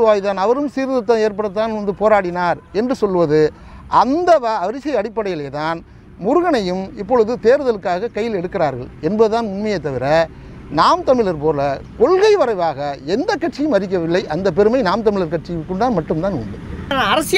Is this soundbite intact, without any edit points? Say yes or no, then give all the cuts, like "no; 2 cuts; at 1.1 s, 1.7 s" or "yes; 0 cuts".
yes; 0 cuts